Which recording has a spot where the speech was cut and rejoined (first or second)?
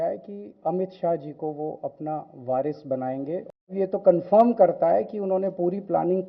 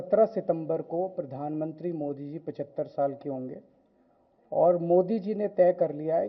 first